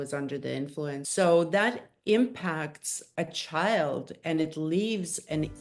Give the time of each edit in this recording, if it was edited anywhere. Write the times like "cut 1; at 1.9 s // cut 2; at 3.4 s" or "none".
cut 1; at 1.1 s